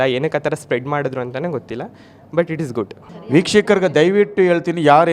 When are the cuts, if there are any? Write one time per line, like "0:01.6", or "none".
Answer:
0:02.9